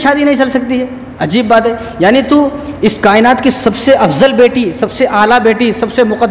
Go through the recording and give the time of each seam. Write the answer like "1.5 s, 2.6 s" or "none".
none